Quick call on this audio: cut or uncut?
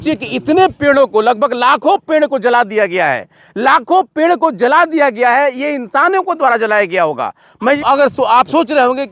cut